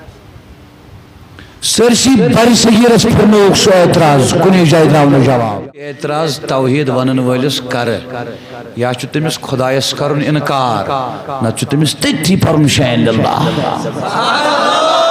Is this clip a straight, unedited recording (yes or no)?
no